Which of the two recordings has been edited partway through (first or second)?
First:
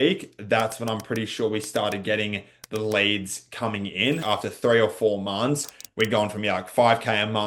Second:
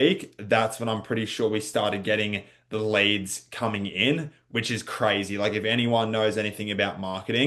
first